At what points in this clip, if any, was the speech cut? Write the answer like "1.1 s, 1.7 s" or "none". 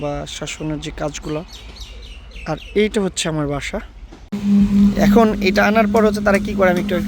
4.5 s

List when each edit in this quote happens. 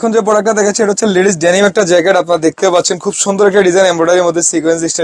none

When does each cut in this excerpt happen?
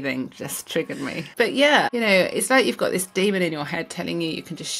1.2 s, 1.9 s

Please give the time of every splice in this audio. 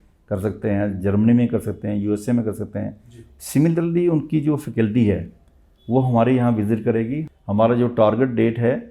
7.2 s

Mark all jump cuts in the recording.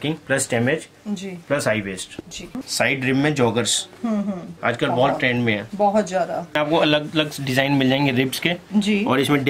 2.5 s, 6.6 s

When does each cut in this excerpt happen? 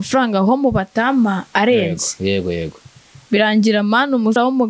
none

